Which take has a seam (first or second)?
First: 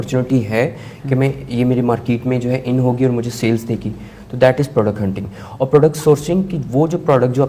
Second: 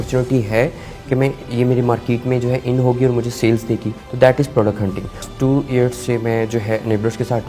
second